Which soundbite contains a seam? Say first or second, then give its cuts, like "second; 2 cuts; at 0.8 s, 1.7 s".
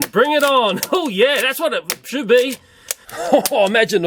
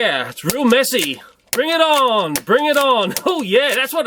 first; 1 cut; at 2.8 s